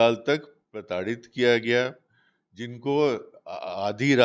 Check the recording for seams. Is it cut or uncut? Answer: uncut